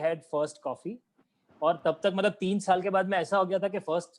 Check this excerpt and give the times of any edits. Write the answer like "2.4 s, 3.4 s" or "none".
none

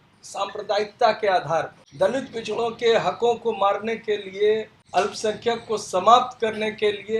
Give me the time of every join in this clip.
1.8 s, 4.8 s

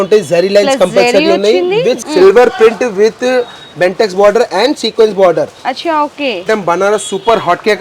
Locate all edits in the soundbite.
2.0 s, 6.5 s

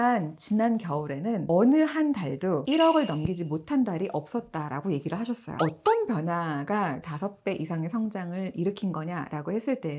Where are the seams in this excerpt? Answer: 5.5 s

